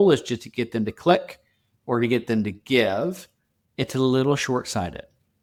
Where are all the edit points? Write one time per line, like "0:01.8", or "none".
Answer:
none